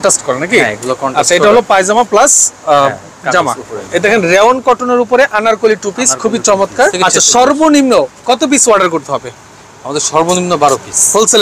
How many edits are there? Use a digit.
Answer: 2